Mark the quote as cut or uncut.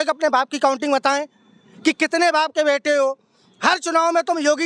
uncut